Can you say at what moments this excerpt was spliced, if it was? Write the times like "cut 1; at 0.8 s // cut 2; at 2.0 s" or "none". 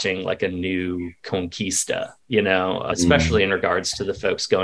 cut 1; at 2.9 s